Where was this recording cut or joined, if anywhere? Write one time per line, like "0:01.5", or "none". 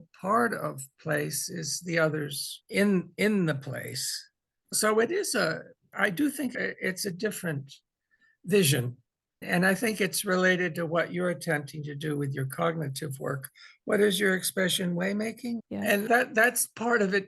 0:02.5